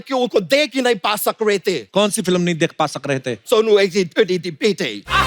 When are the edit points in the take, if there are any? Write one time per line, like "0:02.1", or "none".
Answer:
0:01.8
0:03.4

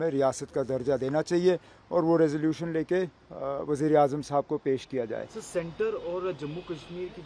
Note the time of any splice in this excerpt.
none

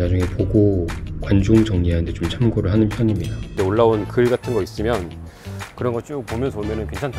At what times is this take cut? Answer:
0:03.6

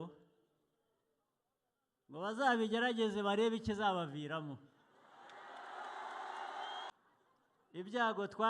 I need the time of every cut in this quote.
0:06.9

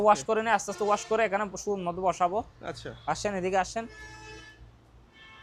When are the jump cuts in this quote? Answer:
none

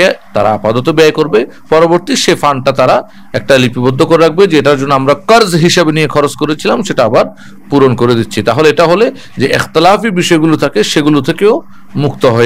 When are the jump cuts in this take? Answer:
none

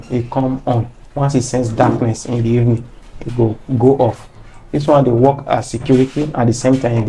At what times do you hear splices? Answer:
none

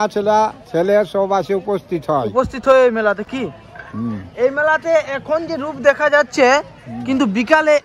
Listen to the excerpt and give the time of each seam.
none

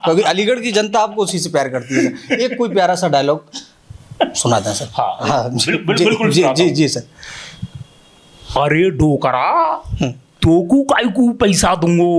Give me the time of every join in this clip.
none

